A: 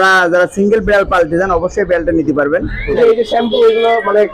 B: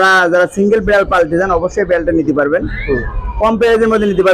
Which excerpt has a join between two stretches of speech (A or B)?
A